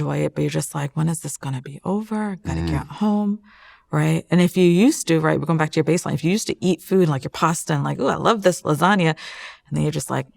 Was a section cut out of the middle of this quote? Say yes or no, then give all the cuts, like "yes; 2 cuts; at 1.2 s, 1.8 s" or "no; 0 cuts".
no; 0 cuts